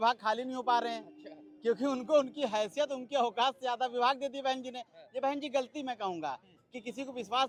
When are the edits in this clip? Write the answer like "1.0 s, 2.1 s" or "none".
none